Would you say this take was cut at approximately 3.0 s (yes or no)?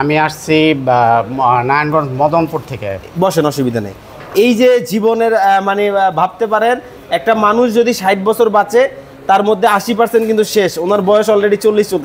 no